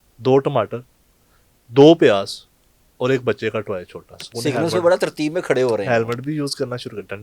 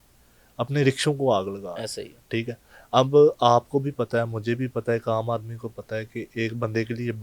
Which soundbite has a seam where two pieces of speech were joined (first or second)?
first